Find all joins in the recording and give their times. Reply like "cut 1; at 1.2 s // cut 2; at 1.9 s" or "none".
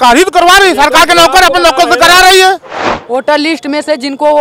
cut 1; at 3.0 s

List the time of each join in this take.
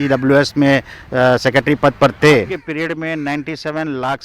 cut 1; at 2.6 s

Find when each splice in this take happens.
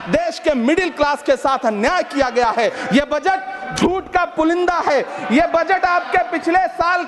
cut 1; at 2.8 s

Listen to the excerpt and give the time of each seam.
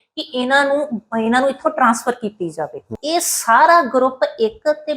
cut 1; at 3.0 s

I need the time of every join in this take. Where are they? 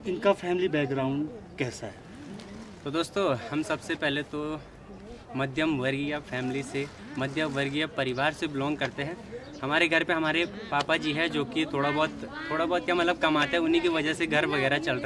none

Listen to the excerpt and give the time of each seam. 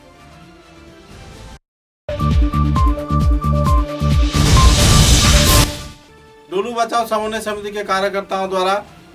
none

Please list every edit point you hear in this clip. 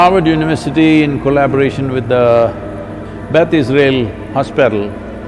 none

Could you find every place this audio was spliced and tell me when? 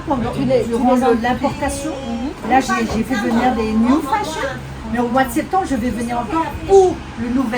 none

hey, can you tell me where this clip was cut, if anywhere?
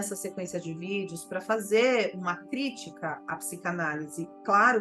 cut 1; at 3.2 s

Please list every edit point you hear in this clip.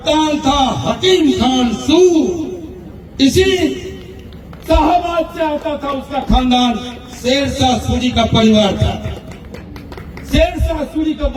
none

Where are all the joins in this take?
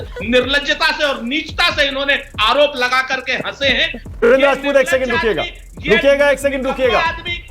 cut 1; at 4.1 s

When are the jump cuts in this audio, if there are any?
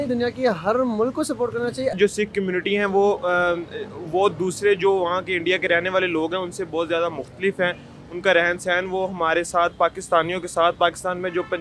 cut 1; at 1.9 s

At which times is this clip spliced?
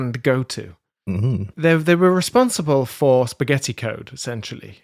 cut 1; at 1.5 s

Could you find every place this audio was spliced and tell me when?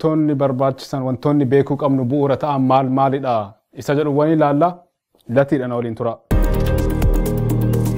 cut 1; at 6.2 s

